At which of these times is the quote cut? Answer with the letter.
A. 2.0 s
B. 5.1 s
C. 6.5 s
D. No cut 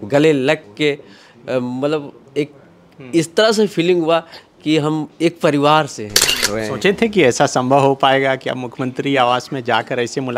C